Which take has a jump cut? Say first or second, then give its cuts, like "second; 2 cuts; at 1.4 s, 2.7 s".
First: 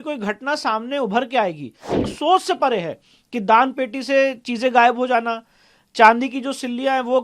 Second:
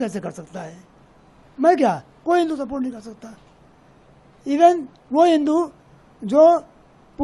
first; 1 cut; at 2.0 s